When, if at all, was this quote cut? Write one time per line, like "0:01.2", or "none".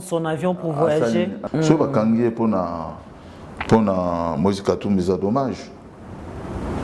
0:01.4